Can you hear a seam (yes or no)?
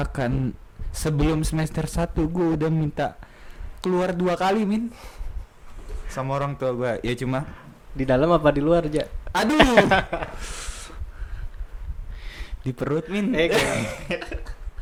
no